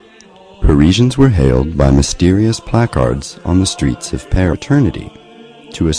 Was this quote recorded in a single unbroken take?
yes; 0 cuts

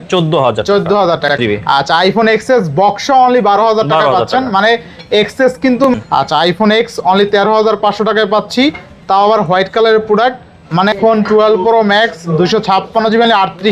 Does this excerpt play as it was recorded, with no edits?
no; 3 cuts; at 1.4 s, 5.9 s, 11.0 s

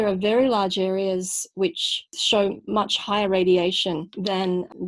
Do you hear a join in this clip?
no; 0 cuts

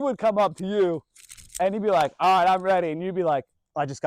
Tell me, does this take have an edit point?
no; 0 cuts

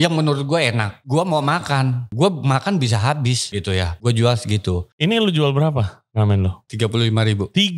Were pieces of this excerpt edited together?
yes; 5 cuts; at 0.9 s, 2.0 s, 3.7 s, 4.9 s, 6.6 s

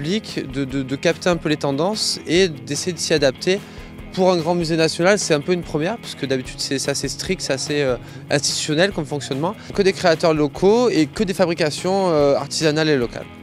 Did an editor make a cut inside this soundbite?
yes; 1 cut; at 4.9 s

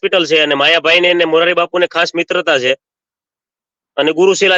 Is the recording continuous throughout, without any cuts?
yes; 0 cuts

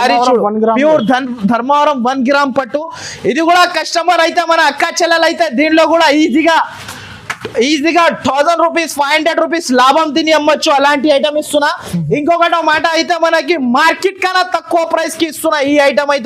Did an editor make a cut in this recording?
no; 0 cuts

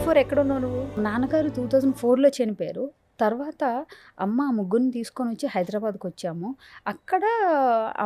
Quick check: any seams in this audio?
yes; 1 cut; at 0.9 s

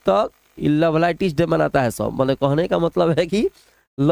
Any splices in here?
no; 0 cuts

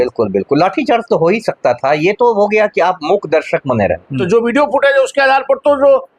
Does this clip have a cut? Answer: yes; 1 cut; at 4.2 s

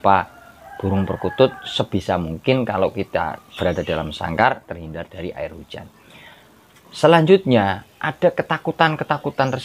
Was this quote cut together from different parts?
no; 0 cuts

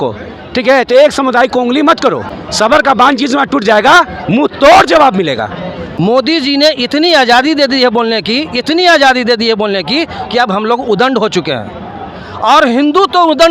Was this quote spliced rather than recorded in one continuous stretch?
yes; 2 cuts; at 2.5 s, 5.9 s

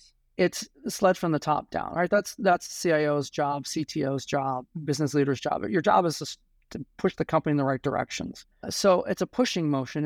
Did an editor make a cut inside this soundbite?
yes; 2 cuts; at 4.7 s, 8.7 s

